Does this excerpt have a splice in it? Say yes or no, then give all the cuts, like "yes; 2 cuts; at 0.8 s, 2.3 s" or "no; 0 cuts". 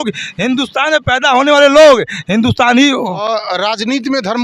yes; 1 cut; at 3.2 s